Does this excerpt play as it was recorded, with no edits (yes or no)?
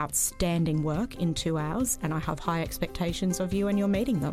no